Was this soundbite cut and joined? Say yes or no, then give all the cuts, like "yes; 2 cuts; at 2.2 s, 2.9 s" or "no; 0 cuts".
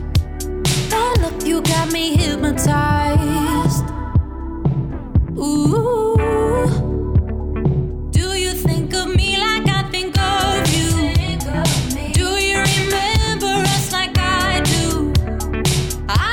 no; 0 cuts